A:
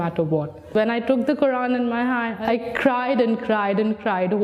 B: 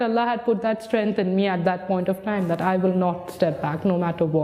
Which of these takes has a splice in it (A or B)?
A